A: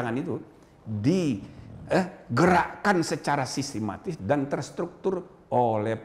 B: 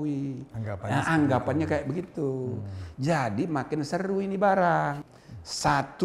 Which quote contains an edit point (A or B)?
B